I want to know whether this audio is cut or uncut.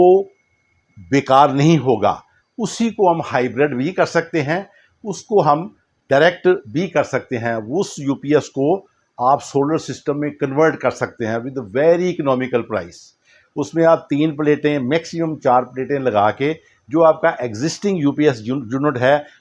uncut